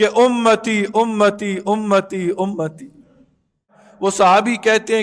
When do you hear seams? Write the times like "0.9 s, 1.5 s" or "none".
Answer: 3.8 s